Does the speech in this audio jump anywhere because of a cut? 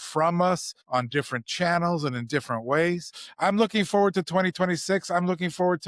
yes; 1 cut; at 3.1 s

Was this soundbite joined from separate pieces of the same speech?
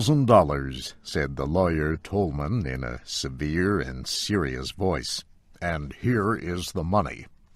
no; 0 cuts

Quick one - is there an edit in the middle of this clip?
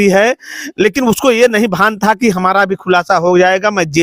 no; 0 cuts

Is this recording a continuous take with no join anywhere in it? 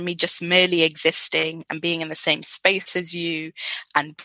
yes; 0 cuts

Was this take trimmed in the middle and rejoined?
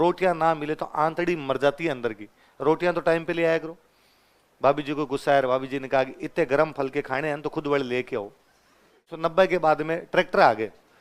yes; 1 cut; at 9.1 s

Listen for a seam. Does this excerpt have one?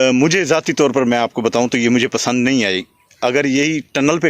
no; 0 cuts

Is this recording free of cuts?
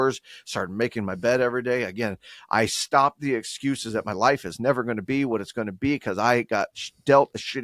yes; 0 cuts

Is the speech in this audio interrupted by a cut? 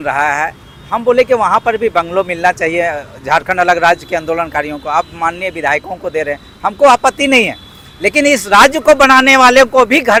no; 0 cuts

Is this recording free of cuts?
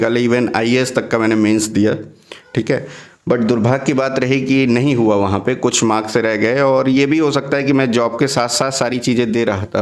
yes; 0 cuts

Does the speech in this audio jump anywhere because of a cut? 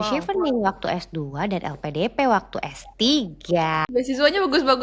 yes; 1 cut; at 3.9 s

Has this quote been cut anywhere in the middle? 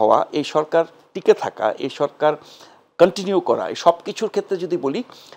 no; 0 cuts

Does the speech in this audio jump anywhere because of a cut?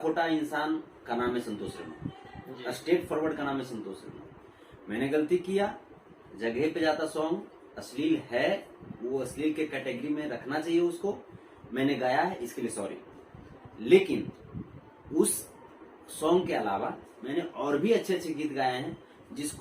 no; 0 cuts

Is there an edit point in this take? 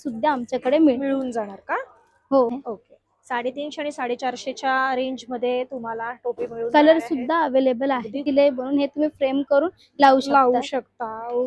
yes; 2 cuts; at 2.5 s, 8.3 s

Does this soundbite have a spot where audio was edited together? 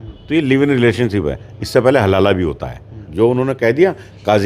yes; 1 cut; at 3.1 s

